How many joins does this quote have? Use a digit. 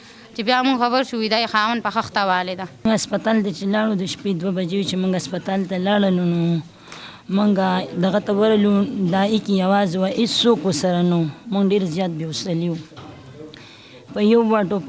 1